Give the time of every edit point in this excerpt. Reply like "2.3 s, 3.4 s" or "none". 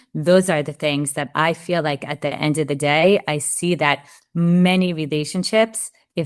none